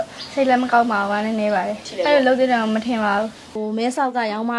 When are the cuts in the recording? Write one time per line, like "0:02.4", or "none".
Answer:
none